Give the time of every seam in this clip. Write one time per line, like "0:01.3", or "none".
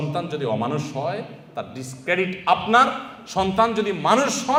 none